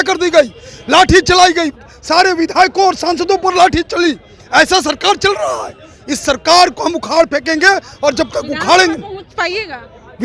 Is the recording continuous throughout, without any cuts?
yes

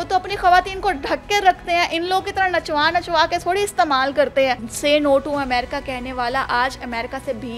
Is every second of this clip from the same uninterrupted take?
no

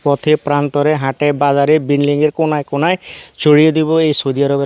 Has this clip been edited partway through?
no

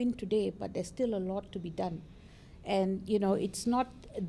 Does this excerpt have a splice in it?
no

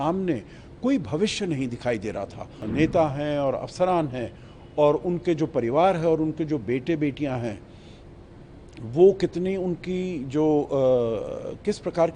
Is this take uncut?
no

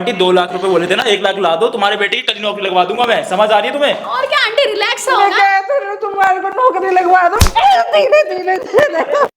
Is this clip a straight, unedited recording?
yes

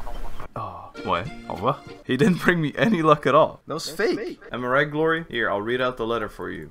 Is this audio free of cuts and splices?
no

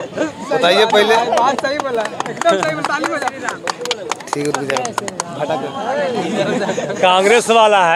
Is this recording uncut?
yes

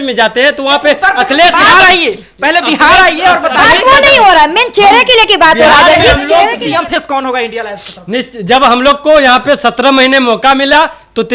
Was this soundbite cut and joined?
yes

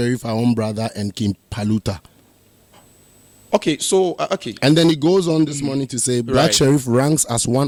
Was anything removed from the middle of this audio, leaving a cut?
no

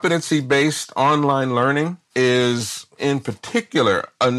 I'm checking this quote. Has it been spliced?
no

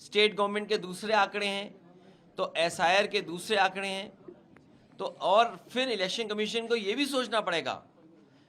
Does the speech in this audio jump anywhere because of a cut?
no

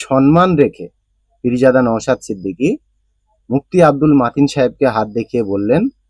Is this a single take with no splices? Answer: yes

